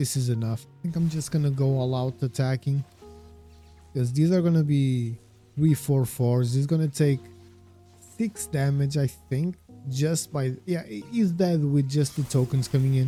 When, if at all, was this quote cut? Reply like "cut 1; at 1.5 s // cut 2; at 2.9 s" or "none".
none